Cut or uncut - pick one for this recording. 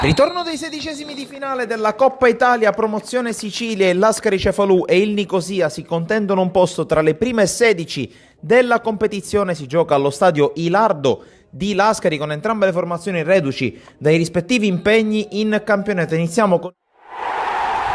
cut